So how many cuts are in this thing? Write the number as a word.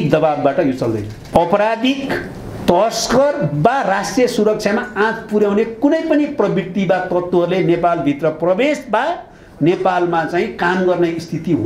one